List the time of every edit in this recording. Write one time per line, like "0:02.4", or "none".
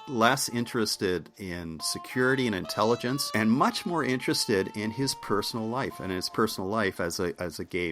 0:03.2